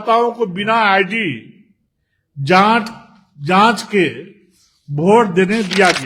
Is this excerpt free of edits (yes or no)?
yes